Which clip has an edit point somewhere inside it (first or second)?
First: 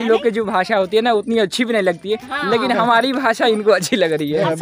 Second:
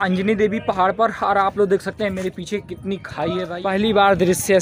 second